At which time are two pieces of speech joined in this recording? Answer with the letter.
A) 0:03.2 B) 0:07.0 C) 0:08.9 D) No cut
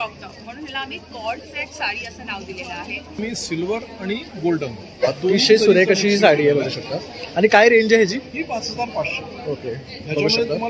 A